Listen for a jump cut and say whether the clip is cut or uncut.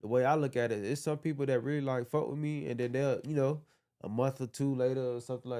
uncut